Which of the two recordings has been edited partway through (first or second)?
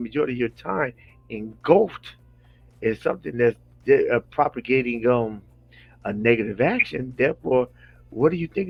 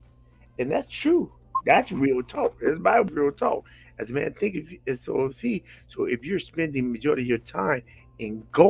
second